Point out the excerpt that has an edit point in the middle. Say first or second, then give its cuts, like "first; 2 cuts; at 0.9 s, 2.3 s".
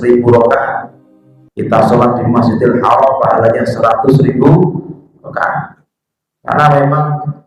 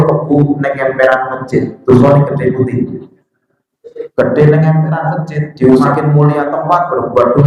second; 1 cut; at 5.9 s